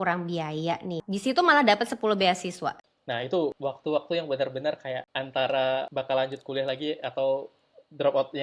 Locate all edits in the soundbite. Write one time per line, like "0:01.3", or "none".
0:01.0
0:02.9
0:03.6
0:05.1
0:05.9